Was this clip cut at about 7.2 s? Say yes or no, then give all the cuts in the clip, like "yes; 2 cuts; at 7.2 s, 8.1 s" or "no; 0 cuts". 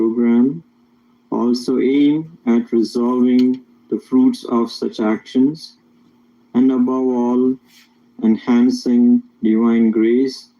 no; 0 cuts